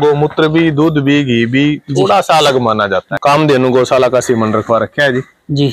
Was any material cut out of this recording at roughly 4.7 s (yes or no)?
no